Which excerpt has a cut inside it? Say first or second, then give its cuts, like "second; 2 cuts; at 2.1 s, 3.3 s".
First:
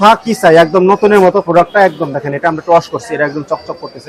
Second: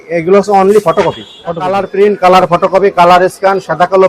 second; 1 cut; at 1.6 s